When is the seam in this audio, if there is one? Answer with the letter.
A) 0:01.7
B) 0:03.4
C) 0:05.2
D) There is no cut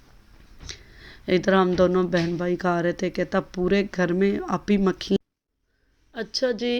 C